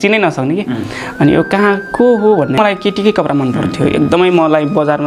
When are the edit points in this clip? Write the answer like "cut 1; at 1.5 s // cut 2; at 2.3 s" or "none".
cut 1; at 2.6 s